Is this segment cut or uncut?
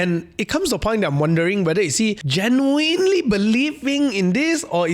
cut